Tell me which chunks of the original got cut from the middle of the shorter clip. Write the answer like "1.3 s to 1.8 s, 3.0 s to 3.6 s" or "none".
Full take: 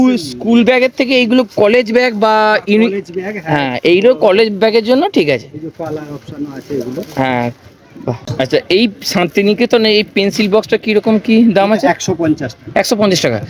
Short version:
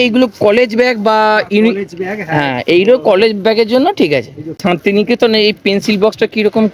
5.7 s to 9.0 s